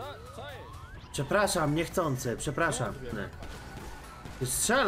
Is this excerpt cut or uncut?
cut